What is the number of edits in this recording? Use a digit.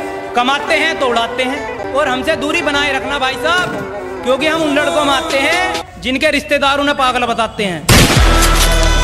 1